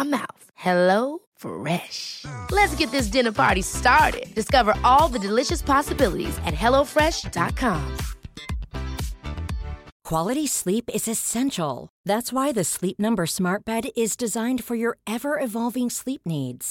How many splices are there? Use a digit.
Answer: 1